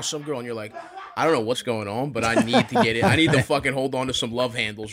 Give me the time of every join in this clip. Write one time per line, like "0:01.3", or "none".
0:01.6